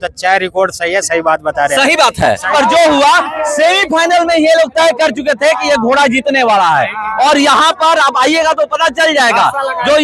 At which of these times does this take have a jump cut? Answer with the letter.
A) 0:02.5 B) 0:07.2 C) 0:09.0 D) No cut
A